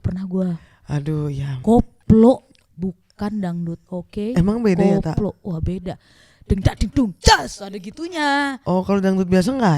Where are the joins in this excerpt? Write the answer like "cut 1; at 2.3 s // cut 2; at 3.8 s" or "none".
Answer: none

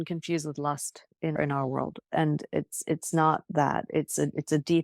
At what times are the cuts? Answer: cut 1; at 1.3 s

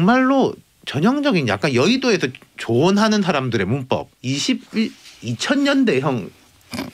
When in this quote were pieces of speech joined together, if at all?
cut 1; at 4.1 s

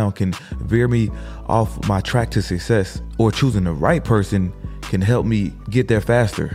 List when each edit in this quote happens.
cut 1; at 3.0 s // cut 2; at 5.6 s

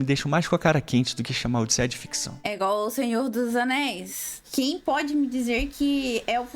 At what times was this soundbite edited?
cut 1; at 2.5 s // cut 2; at 4.4 s

